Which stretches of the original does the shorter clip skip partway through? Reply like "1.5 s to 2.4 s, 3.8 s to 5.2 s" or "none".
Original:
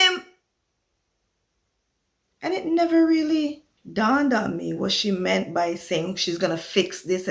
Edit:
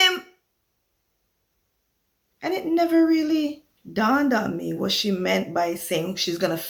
none